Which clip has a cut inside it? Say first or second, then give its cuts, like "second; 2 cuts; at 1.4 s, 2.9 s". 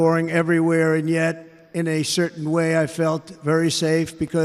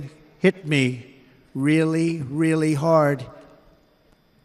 second; 1 cut; at 3.2 s